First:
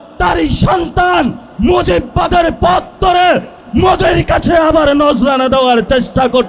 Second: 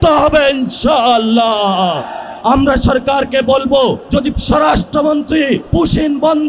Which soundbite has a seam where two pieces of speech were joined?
second; 3 cuts; at 2.2 s, 4.2 s, 5.7 s

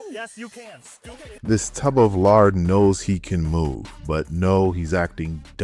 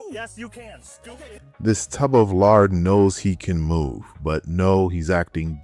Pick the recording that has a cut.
first; 1 cut; at 1.3 s

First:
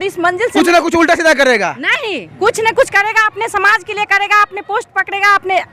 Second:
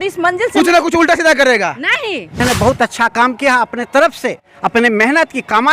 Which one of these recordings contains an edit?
second; 1 cut; at 2.4 s

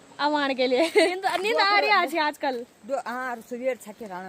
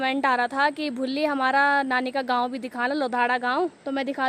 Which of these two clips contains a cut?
first; 1 cut; at 1.1 s

